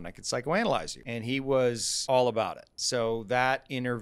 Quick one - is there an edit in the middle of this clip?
yes; 3 cuts; at 1.0 s, 1.9 s, 2.7 s

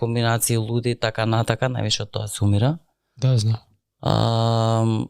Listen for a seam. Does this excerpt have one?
no; 0 cuts

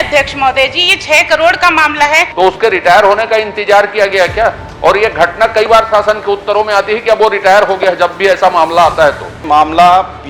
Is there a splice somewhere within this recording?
yes; 2 cuts; at 2.3 s, 9.4 s

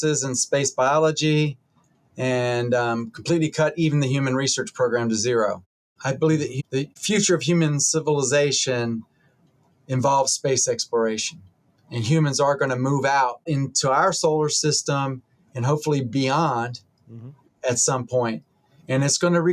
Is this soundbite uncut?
no; 3 cuts; at 5.9 s, 6.9 s, 13.5 s

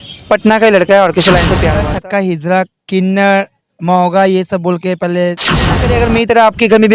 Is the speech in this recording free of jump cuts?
no; 2 cuts; at 1.7 s, 5.8 s

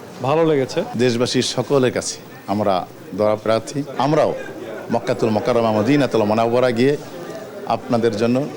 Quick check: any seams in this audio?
yes; 2 cuts; at 0.9 s, 3.9 s

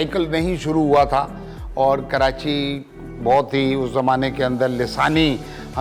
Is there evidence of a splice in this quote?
no; 0 cuts

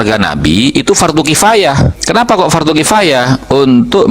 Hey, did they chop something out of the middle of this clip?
yes; 1 cut; at 2.0 s

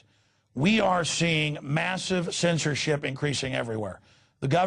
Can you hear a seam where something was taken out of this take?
no; 0 cuts

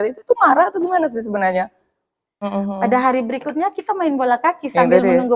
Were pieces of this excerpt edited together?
yes; 1 cut; at 2.5 s

